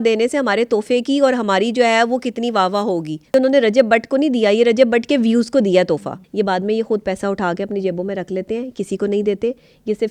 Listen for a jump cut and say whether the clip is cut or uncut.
cut